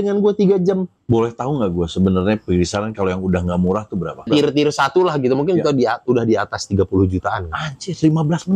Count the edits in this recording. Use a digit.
2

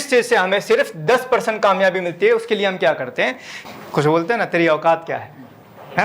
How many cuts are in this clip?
1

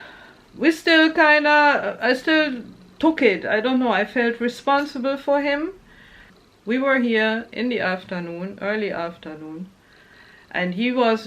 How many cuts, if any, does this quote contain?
1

